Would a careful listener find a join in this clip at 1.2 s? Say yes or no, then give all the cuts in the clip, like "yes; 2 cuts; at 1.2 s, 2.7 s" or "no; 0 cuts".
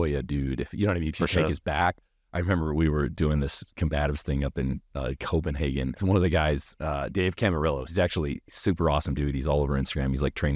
no; 1 cut; at 6.0 s